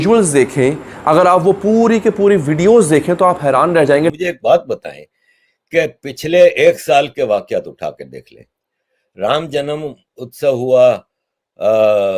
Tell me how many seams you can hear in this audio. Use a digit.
1